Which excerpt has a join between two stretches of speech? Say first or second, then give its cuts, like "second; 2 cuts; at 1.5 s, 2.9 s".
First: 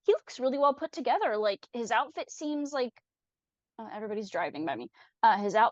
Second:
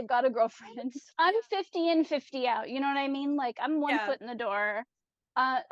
second; 1 cut; at 1.0 s